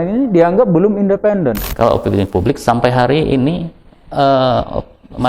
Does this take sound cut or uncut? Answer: cut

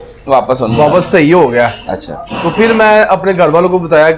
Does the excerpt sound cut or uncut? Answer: uncut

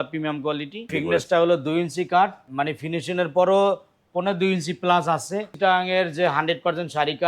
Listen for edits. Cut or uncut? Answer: cut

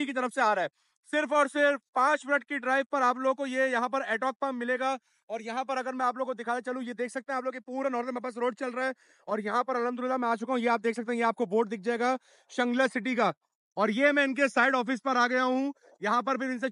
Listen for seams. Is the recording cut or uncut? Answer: uncut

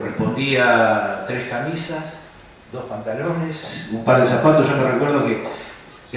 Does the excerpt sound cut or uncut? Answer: cut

